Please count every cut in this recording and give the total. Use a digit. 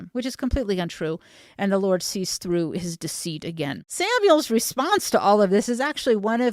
1